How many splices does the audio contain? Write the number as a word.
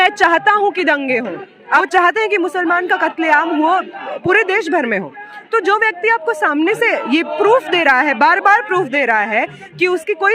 one